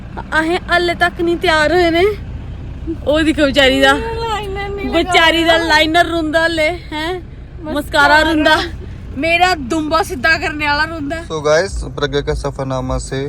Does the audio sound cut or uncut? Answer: cut